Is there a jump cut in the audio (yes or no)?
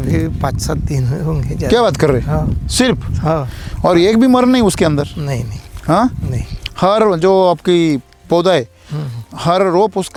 no